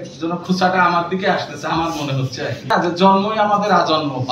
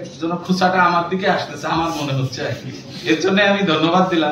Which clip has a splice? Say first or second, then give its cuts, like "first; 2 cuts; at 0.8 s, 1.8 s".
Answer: first; 1 cut; at 2.7 s